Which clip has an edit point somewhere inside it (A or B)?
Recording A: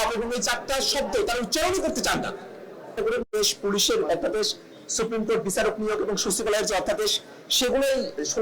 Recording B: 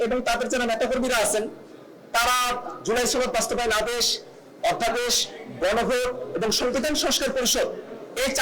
A